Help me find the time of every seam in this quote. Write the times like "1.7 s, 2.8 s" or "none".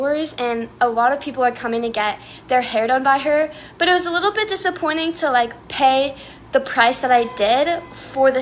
none

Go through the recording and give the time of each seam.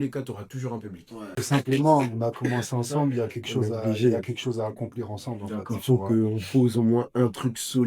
1.4 s

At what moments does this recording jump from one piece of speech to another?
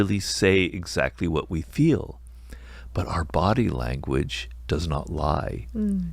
none

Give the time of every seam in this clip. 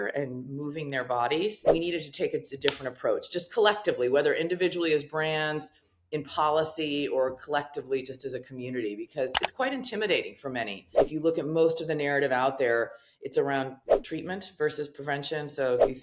1.6 s, 11.0 s, 13.9 s

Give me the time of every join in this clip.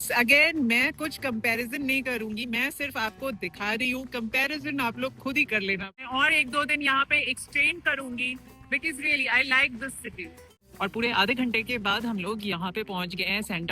6.0 s, 10.6 s

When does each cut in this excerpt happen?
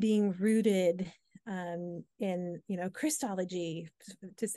none

